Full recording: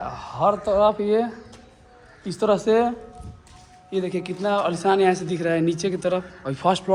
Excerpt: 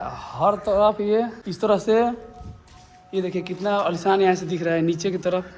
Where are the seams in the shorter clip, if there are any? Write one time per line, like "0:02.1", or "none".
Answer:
0:01.4